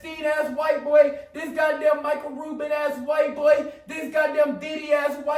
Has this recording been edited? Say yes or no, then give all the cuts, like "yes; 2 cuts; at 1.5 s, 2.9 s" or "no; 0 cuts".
no; 0 cuts